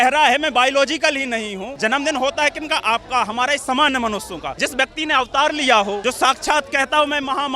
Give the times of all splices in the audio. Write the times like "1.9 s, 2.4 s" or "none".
1.7 s, 4.5 s, 6.0 s